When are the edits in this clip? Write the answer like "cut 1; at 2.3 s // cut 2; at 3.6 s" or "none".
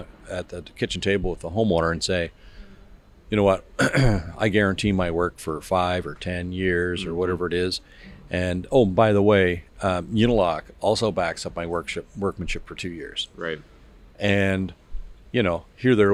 none

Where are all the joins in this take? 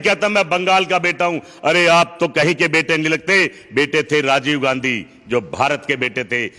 none

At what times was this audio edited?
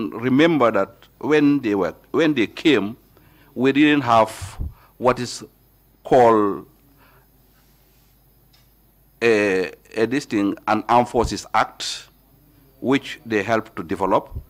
none

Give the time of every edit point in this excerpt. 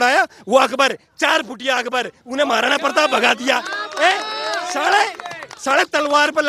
none

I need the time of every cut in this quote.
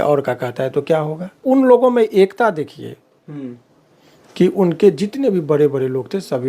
cut 1; at 1.4 s

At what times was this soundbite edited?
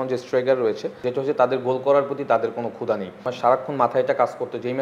cut 1; at 0.9 s // cut 2; at 3.3 s

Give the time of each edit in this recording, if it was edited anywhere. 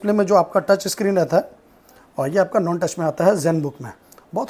none

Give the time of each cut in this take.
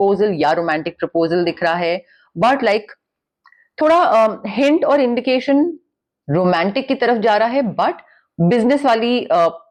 none

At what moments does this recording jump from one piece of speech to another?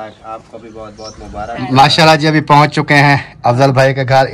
cut 1; at 1.6 s

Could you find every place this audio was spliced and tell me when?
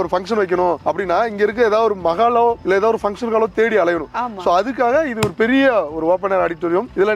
none

